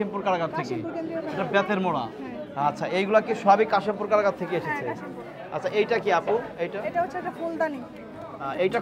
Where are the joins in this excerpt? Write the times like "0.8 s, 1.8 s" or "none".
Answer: none